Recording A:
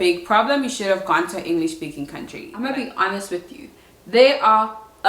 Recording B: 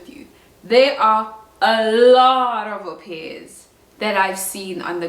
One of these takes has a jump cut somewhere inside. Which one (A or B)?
A